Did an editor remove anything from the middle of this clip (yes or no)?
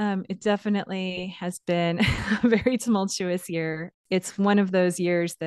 yes